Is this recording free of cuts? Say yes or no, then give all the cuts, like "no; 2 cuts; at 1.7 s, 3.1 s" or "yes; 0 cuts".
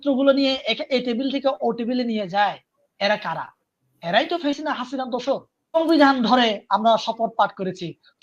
no; 1 cut; at 5.8 s